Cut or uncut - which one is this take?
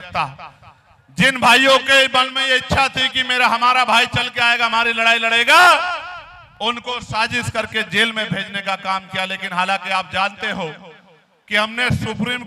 uncut